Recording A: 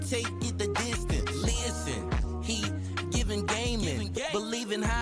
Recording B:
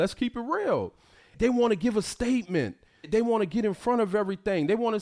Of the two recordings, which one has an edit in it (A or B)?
B